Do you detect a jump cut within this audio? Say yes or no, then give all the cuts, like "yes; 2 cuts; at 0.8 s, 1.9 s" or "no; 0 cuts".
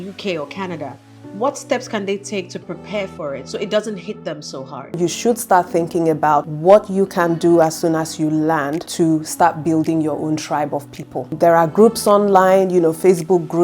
yes; 2 cuts; at 5.0 s, 11.3 s